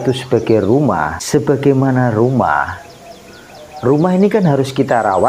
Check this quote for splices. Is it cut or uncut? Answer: cut